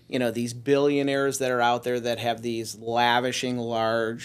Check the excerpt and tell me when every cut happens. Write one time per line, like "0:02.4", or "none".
none